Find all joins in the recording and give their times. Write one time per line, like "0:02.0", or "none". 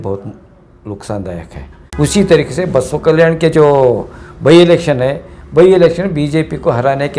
0:01.8